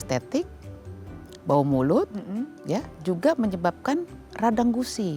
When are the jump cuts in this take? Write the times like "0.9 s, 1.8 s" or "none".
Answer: none